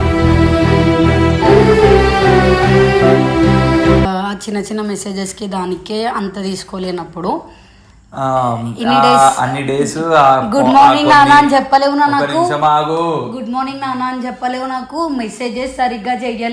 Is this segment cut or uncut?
cut